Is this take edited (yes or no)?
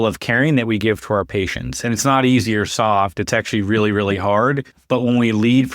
yes